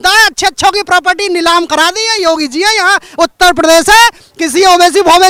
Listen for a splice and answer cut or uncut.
uncut